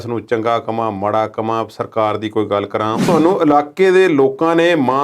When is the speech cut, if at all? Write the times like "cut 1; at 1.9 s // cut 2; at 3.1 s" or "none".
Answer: cut 1; at 3.0 s